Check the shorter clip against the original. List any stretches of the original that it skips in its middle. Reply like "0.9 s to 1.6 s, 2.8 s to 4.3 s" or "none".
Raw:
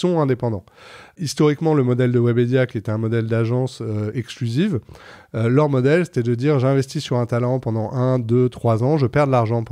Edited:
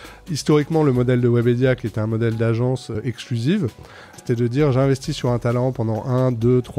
3.9 s to 4.1 s, 5.3 s to 6.1 s